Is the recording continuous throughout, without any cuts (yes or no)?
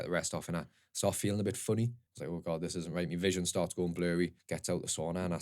no